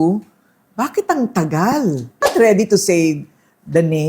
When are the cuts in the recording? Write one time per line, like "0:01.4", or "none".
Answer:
0:02.2